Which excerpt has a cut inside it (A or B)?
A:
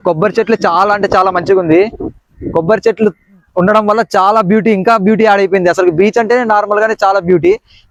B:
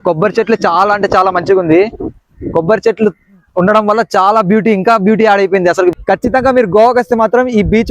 B